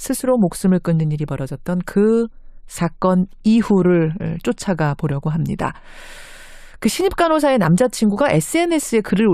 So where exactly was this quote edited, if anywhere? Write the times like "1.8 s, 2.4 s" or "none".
none